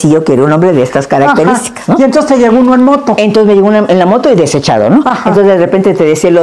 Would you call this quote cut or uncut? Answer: uncut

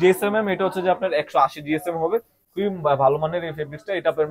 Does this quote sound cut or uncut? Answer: uncut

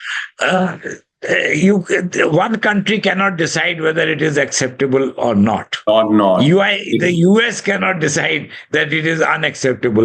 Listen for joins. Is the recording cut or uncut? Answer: uncut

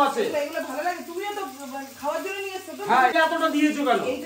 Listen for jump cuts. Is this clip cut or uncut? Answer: cut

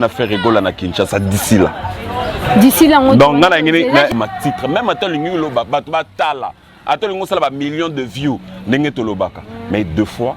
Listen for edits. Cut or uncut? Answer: cut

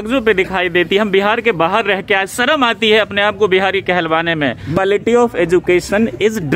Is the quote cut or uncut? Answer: cut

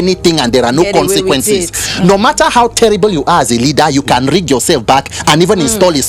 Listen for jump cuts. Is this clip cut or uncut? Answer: uncut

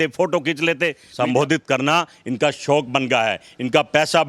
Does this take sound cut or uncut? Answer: cut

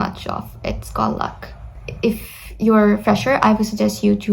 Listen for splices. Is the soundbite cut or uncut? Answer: cut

